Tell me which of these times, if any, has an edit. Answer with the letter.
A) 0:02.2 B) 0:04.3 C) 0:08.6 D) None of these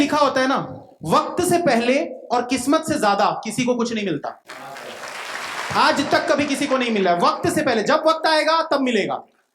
D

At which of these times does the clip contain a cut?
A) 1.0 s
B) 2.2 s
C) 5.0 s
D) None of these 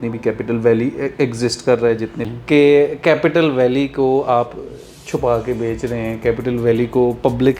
B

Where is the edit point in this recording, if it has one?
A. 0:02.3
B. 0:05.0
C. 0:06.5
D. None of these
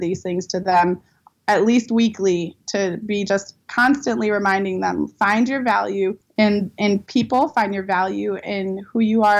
C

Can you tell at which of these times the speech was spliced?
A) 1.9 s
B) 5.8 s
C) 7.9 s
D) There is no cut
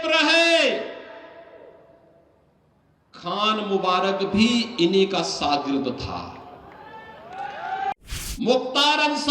C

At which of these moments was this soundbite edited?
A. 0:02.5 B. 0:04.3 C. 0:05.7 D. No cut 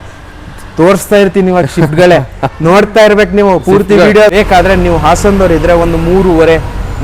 B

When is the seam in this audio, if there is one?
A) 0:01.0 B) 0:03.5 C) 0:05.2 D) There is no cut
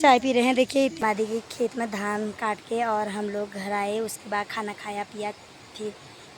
A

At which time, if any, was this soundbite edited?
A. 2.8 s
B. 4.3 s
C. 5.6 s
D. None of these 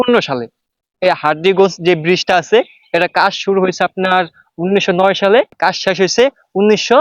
C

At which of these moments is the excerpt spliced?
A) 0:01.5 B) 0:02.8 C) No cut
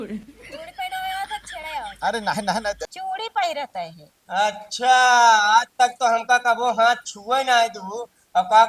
B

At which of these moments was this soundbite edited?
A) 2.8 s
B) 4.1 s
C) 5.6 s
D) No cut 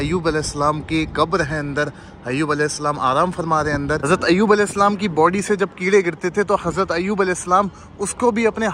B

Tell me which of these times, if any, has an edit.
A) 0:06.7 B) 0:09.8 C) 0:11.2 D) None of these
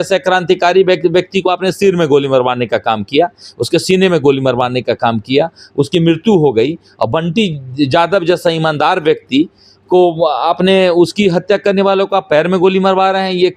D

